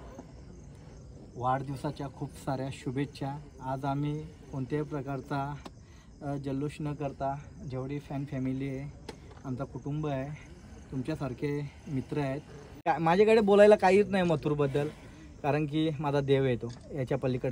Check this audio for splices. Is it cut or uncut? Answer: cut